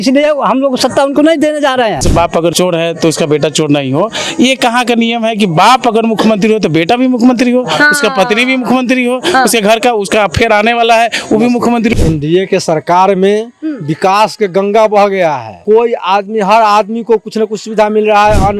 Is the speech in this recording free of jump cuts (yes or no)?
no